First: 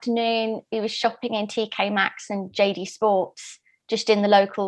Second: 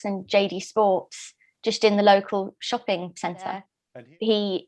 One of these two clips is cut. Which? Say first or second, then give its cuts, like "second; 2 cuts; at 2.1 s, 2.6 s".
second; 1 cut; at 3.8 s